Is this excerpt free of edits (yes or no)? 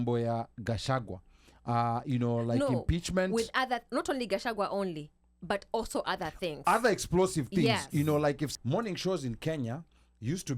no